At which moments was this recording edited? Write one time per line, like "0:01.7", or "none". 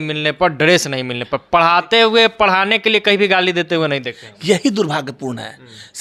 none